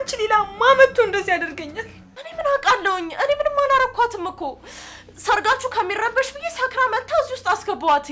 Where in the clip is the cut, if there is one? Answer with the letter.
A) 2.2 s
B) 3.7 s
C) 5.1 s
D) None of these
A